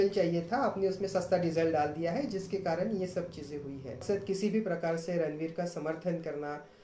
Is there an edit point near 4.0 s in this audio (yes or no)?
yes